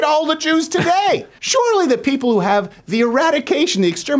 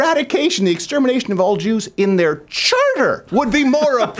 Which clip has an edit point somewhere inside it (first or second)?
first